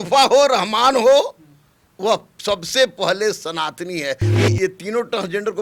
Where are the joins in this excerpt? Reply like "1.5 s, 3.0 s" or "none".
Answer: 4.3 s